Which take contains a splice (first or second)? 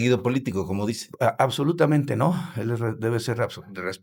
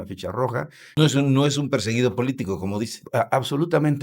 second